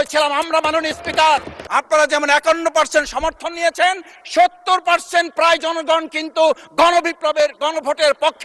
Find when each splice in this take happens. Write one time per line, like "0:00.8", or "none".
0:01.6

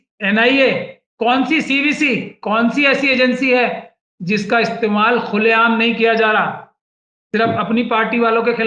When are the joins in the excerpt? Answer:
0:01.0

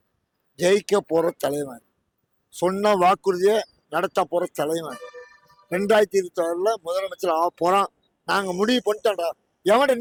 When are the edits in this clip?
none

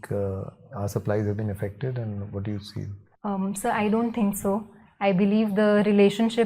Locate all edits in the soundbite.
0:03.0

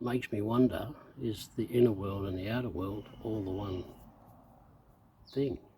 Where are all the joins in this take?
none

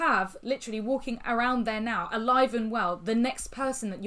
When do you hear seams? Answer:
none

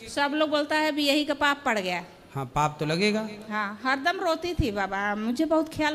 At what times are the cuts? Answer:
none

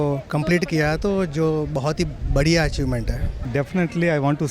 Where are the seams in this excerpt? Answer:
0:03.3

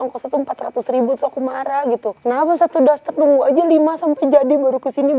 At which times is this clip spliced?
0:02.1

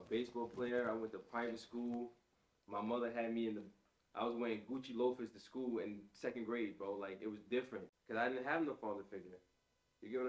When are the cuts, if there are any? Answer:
0:07.9

